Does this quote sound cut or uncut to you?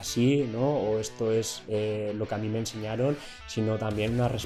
uncut